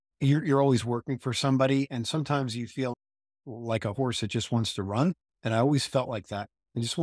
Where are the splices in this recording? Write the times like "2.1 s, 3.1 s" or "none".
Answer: 2.9 s